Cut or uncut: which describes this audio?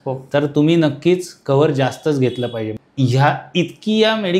cut